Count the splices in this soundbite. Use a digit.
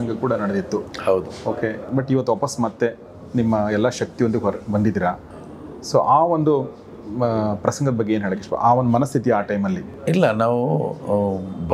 0